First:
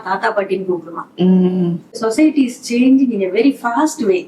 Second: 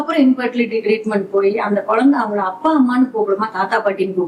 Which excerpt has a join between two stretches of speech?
first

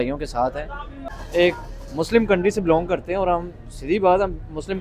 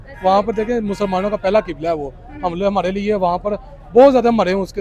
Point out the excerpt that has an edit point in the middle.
first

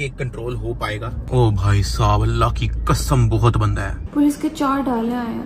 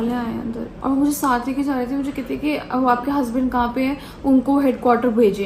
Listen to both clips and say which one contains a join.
first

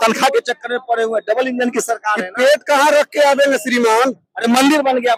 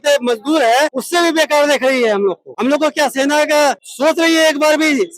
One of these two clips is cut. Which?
second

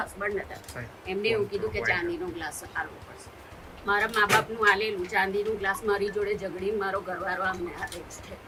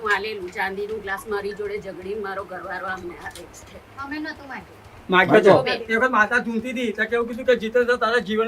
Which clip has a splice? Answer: second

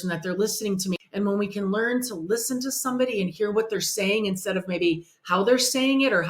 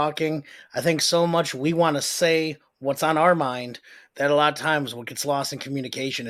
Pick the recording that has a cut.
first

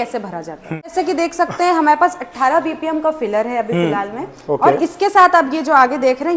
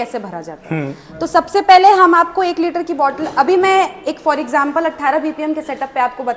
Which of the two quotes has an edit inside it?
first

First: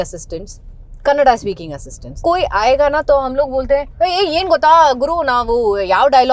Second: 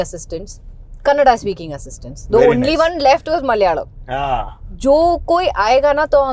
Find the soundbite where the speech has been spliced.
first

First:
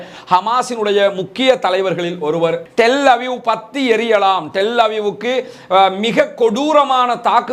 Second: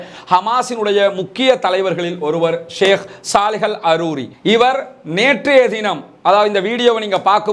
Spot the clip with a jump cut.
first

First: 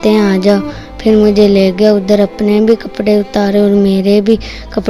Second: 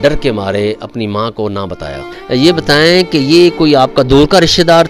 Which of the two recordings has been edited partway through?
second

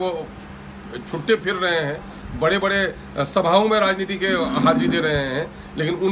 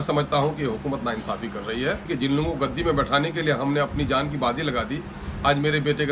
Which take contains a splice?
second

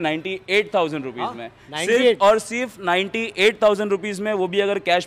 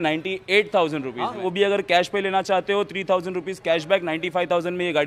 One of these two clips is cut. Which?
second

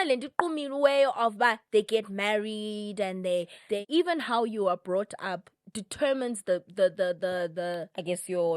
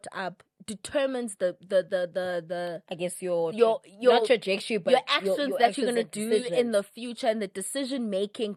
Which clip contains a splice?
first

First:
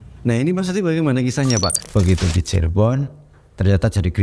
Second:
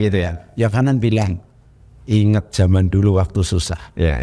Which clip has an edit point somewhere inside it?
first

